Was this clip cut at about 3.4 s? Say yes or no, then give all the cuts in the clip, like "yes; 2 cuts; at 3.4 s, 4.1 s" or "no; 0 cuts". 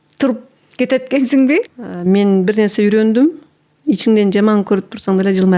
no; 1 cut; at 1.7 s